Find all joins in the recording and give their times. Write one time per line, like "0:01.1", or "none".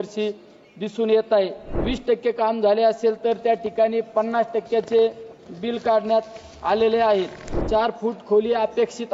0:01.8
0:07.6